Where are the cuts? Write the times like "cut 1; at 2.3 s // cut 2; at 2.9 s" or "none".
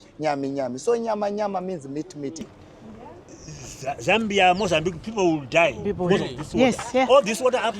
cut 1; at 2.5 s

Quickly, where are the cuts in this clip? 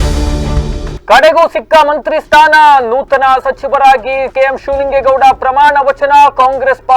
cut 1; at 1.0 s

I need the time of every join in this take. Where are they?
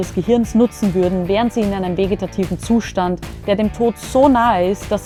none

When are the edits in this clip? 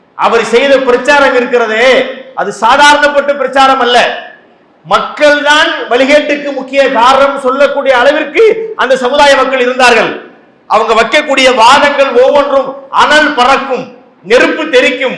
none

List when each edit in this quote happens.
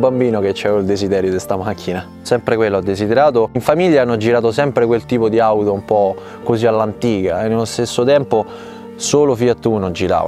cut 1; at 2.2 s // cut 2; at 3.6 s

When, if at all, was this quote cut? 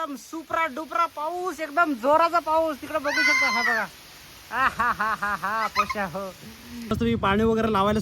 cut 1; at 6.9 s

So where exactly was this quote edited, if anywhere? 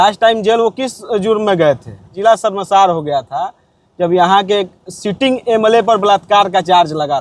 cut 1; at 2.2 s

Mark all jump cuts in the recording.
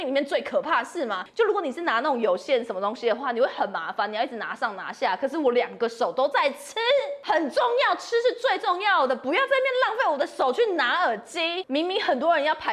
cut 1; at 1.2 s // cut 2; at 7.2 s // cut 3; at 11.6 s

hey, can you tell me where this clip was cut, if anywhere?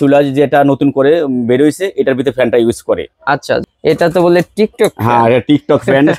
cut 1; at 3.6 s

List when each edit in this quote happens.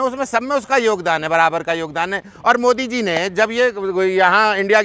none

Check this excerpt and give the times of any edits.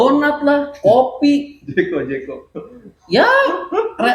none

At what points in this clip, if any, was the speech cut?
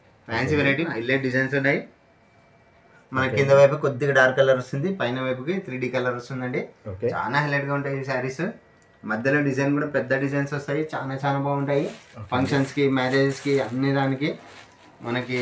cut 1; at 0.9 s // cut 2; at 2.9 s

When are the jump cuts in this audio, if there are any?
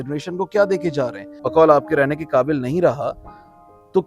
cut 1; at 1.4 s

